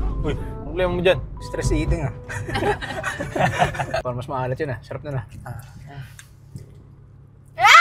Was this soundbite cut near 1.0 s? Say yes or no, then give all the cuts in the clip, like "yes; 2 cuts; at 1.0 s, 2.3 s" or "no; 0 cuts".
no; 1 cut; at 4.1 s